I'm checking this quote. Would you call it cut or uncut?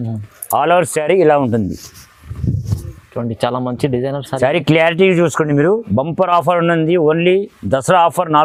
uncut